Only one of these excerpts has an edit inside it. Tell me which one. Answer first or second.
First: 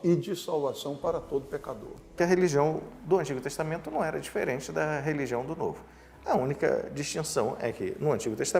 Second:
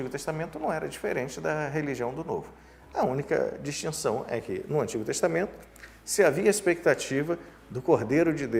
first